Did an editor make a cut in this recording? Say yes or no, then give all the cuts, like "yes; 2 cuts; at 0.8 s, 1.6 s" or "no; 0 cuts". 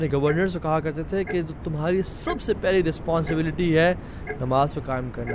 no; 0 cuts